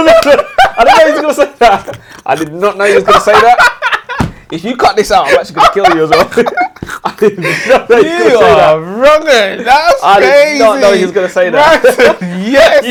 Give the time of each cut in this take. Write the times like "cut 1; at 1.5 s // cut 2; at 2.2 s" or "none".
none